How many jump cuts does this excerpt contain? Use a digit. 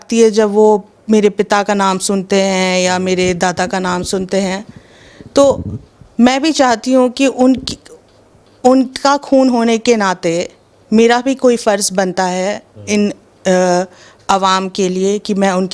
0